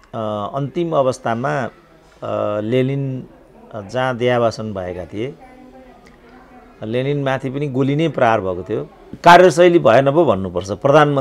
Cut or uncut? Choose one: cut